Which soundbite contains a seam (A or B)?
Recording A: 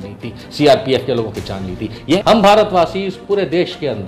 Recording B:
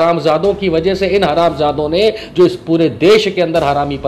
A